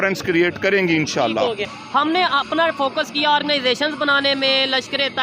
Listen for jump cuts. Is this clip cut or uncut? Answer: cut